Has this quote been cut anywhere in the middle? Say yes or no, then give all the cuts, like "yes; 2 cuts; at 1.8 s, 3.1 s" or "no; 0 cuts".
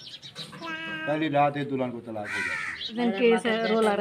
yes; 1 cut; at 3.0 s